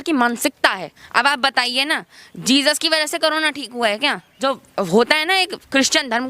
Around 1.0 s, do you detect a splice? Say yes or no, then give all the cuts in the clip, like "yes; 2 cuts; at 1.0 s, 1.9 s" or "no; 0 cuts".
yes; 2 cuts; at 1.0 s, 4.3 s